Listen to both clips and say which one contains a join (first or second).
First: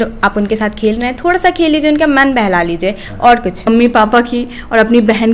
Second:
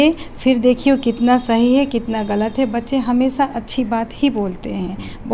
first